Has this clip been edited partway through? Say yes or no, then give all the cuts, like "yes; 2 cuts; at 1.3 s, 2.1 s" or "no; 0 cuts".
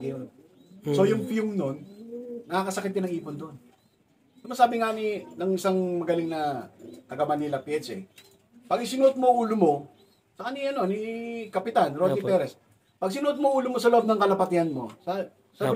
no; 0 cuts